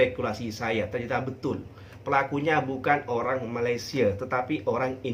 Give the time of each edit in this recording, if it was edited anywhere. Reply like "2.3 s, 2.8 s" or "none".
none